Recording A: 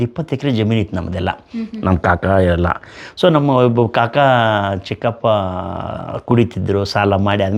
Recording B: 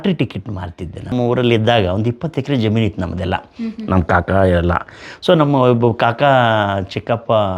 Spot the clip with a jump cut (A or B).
B